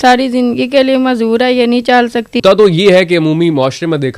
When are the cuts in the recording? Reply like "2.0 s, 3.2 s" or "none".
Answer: 2.4 s

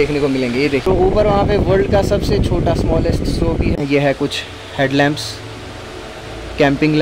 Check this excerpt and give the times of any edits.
0.8 s, 3.8 s

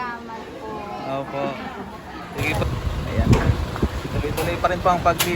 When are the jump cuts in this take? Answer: 2.6 s

